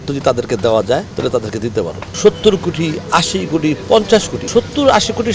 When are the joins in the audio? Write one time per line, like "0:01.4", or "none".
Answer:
0:01.1
0:02.1
0:04.4